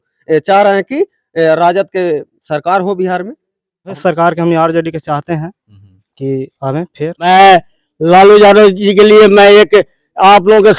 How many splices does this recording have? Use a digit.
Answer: 2